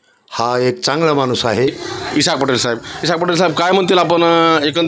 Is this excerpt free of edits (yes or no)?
no